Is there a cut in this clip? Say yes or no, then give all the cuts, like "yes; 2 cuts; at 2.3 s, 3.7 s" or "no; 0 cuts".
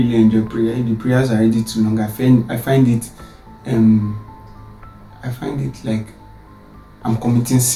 no; 0 cuts